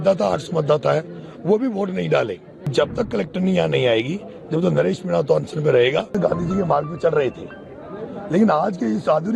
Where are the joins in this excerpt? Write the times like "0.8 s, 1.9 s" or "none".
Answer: 2.5 s, 6.1 s

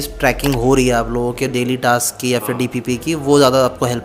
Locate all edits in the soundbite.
none

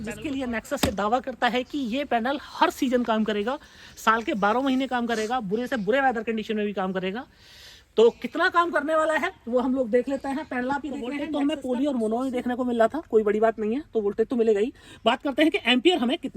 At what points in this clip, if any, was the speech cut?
11.3 s

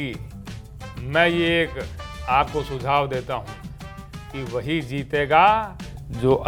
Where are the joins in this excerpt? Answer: none

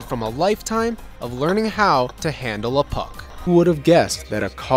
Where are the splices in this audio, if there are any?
3.5 s

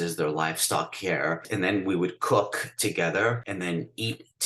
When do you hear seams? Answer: 1.5 s, 3.4 s

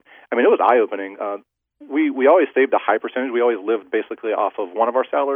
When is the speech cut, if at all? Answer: none

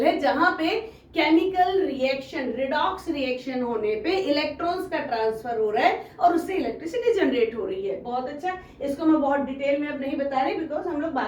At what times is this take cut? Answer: none

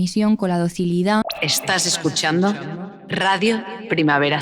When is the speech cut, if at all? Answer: 1.3 s

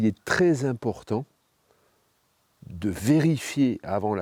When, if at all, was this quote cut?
none

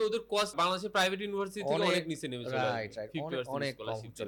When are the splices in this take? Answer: none

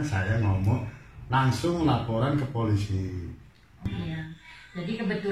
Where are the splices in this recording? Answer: 3.9 s

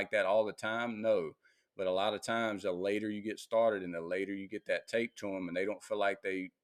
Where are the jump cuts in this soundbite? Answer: none

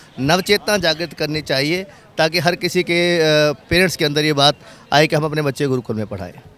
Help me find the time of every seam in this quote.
none

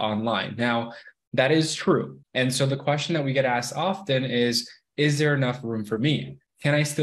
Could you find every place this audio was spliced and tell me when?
2.2 s

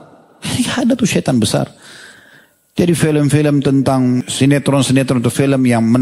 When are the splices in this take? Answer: 4.2 s

